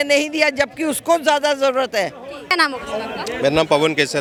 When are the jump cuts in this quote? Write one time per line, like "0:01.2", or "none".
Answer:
none